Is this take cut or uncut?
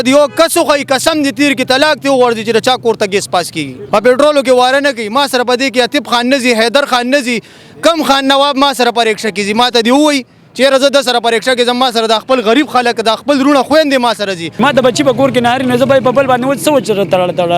cut